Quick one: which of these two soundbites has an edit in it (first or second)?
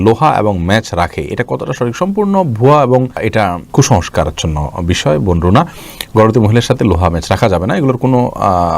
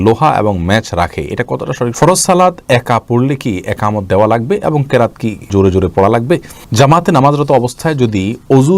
second